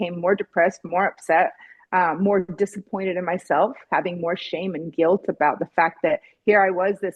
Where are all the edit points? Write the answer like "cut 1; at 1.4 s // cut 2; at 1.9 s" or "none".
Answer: none